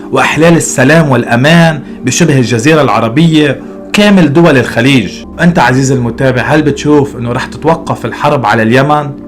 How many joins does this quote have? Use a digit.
1